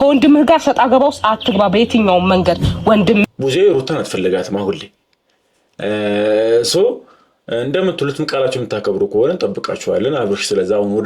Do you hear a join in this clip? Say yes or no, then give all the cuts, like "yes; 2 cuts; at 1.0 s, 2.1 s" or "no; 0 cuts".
yes; 1 cut; at 3.2 s